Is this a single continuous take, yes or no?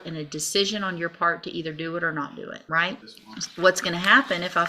no